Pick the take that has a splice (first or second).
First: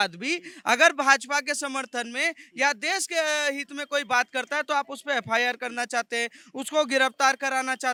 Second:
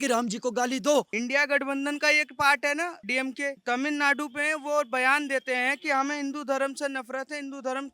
second